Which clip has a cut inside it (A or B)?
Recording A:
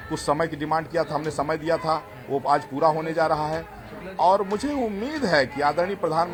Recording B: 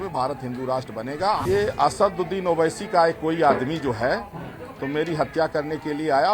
B